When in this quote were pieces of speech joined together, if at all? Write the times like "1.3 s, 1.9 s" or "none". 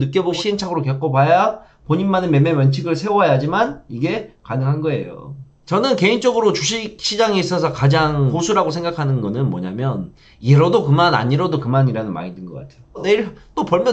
12.9 s